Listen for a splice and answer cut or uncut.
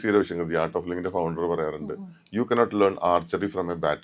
uncut